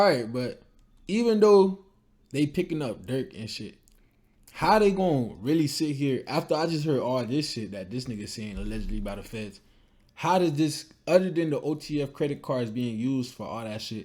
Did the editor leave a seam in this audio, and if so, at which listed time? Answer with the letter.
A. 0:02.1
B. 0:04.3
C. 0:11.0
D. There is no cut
D